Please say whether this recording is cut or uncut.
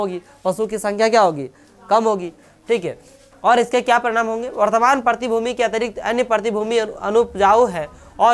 uncut